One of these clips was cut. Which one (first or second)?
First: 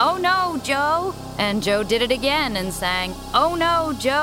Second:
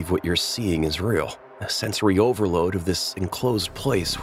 first